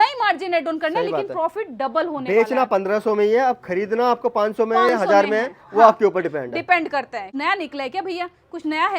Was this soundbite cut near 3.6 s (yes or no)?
no